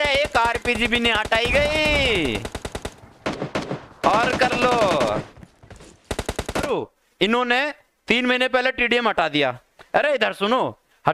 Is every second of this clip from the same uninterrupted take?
no; 1 cut; at 6.7 s

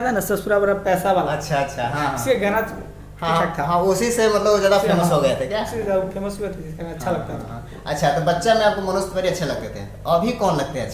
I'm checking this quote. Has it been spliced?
no; 0 cuts

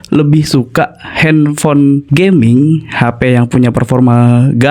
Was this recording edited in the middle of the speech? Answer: yes; 1 cut; at 2.1 s

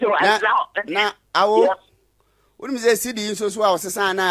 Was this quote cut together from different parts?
no; 0 cuts

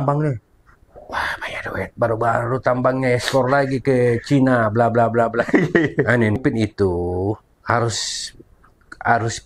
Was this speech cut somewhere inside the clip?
yes; 1 cut; at 6.4 s

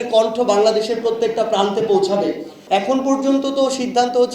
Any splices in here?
yes; 1 cut; at 2.5 s

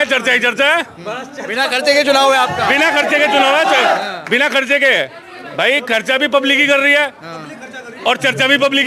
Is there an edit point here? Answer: no; 0 cuts

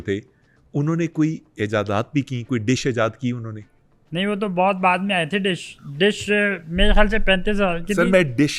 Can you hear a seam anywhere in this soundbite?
no; 0 cuts

